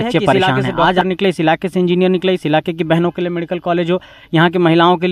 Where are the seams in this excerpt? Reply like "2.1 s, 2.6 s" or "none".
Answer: 1.0 s